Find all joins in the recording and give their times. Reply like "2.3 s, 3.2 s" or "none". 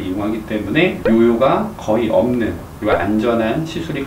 2.7 s

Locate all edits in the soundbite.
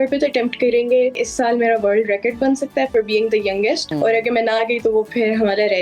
1.2 s, 3.9 s

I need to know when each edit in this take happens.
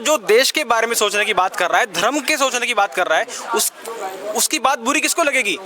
none

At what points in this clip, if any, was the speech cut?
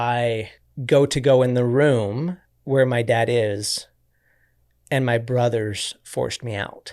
none

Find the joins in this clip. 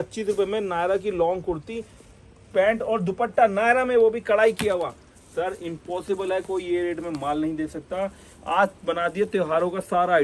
none

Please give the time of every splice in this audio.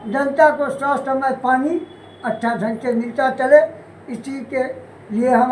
none

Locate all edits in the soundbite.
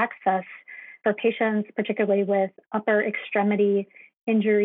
1.0 s

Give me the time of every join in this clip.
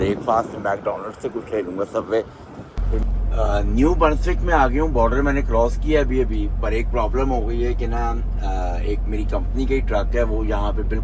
3.0 s

